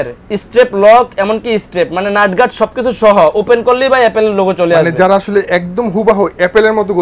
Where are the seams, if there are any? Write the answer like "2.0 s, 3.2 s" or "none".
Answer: none